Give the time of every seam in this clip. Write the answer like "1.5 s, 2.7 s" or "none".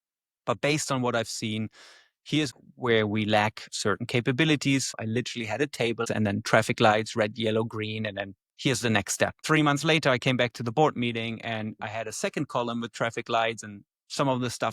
2.5 s, 4.9 s, 6.1 s, 9.4 s